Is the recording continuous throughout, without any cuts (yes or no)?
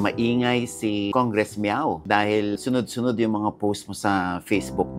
no